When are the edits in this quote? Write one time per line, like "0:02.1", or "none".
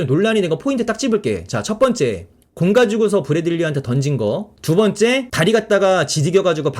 0:04.5
0:05.3